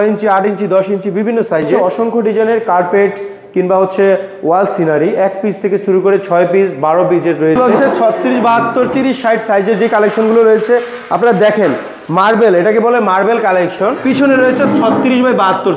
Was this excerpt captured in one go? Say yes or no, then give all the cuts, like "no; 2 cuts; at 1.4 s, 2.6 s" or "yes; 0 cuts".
no; 3 cuts; at 1.9 s, 7.6 s, 14.0 s